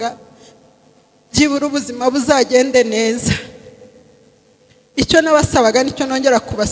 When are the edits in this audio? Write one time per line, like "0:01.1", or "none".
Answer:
none